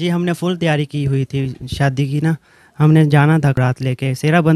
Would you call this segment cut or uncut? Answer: cut